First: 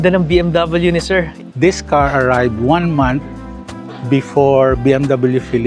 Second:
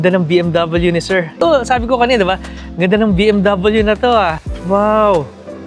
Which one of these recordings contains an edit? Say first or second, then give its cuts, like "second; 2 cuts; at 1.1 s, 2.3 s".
first; 1 cut; at 1.3 s